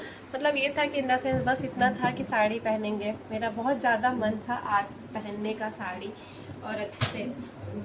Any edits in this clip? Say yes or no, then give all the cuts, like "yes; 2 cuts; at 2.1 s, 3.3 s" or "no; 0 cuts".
no; 0 cuts